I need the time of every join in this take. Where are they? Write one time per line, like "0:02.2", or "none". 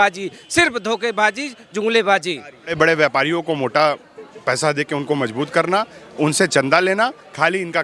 0:02.8